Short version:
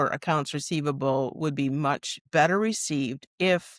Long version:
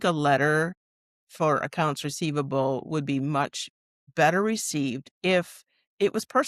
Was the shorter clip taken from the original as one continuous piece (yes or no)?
no